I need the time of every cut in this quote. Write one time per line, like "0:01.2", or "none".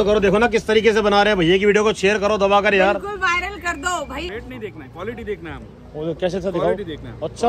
0:04.3